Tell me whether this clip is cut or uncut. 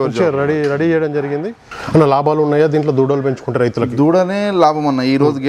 cut